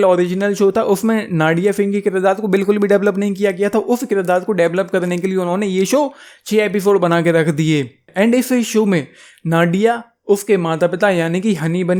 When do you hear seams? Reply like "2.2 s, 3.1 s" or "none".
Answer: none